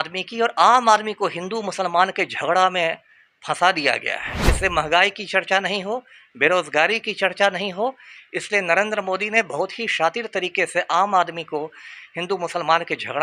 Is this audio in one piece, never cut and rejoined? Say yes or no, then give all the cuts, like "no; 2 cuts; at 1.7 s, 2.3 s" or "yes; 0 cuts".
yes; 0 cuts